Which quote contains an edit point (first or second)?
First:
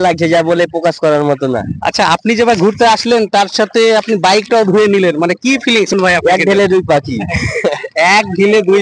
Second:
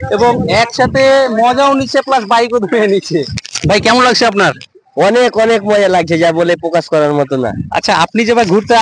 second